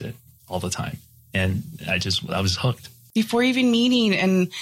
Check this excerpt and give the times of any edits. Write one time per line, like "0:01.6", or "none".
0:03.0